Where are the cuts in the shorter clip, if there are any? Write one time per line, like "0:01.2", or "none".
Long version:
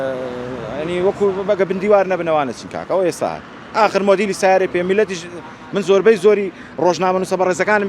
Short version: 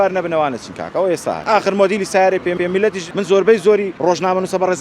0:01.4
0:02.6
0:03.9